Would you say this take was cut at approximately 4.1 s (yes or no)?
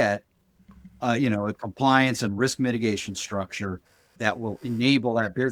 yes